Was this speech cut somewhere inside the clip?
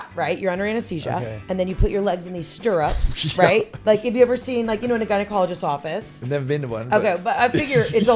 no; 0 cuts

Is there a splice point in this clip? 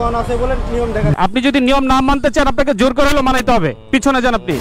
yes; 1 cut; at 1.1 s

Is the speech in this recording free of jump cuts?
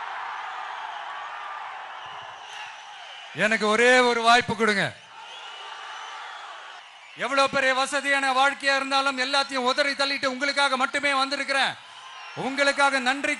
no; 1 cut; at 6.8 s

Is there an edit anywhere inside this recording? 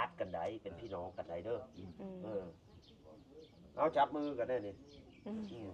no; 0 cuts

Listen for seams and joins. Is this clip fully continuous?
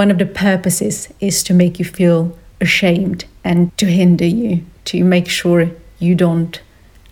yes; 0 cuts

